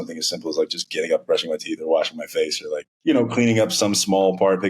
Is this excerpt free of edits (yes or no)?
no